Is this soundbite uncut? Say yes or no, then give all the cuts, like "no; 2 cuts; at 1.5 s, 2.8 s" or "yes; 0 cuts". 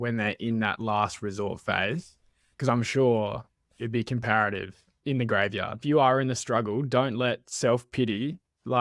no; 1 cut; at 5.8 s